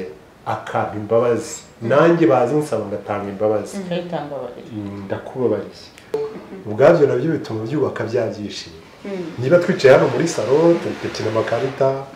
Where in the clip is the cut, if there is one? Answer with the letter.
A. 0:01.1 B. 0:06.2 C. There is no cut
B